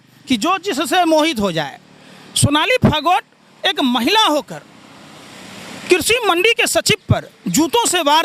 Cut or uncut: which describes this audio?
uncut